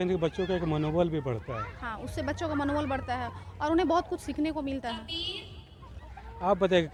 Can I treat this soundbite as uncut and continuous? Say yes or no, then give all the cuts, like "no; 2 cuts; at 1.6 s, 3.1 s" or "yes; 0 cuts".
yes; 0 cuts